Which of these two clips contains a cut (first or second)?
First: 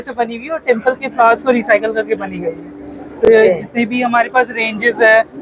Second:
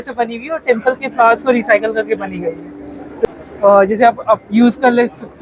second